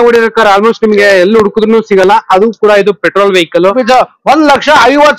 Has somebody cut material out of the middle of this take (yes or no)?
yes